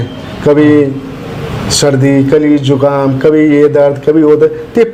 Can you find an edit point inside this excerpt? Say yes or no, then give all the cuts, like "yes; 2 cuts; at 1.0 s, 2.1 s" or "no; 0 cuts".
no; 0 cuts